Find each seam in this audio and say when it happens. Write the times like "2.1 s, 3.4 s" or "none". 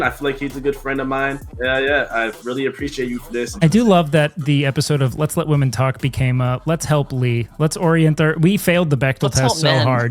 1.5 s, 3.5 s